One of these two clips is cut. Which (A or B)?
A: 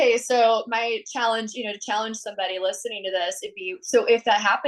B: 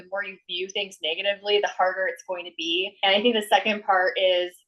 B